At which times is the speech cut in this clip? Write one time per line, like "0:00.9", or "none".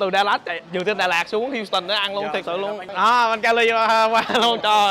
0:02.9